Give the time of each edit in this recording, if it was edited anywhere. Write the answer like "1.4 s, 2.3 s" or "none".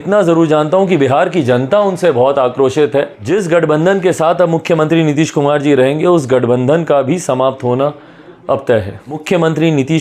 3.2 s, 9.2 s